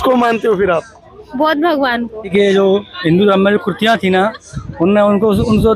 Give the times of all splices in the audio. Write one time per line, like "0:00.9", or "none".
0:02.3